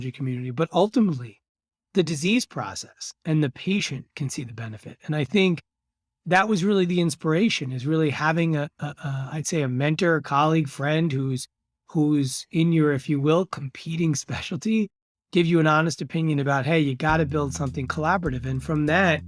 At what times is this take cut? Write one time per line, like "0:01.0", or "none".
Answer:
none